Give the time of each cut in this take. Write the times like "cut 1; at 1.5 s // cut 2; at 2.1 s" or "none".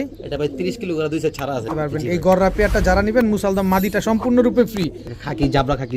cut 1; at 1.7 s // cut 2; at 5.1 s